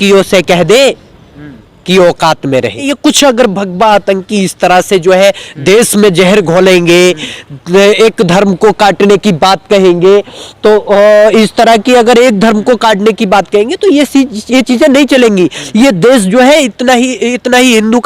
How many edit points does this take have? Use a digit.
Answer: 1